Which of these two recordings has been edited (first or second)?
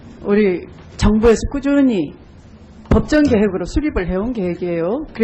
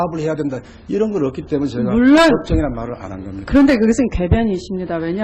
second